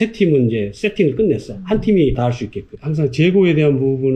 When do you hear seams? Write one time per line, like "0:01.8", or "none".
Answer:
0:02.2